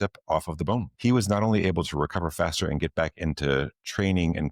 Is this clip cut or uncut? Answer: cut